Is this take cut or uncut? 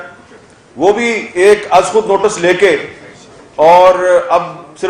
uncut